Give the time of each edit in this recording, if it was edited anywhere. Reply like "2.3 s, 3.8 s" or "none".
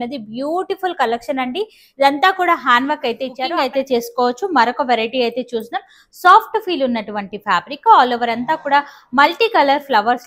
3.5 s